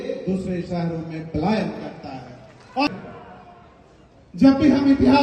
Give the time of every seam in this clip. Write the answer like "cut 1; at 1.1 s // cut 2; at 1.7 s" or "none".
cut 1; at 2.9 s